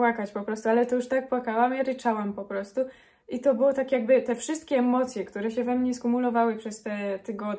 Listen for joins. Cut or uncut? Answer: uncut